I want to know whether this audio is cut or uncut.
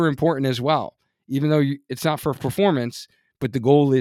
uncut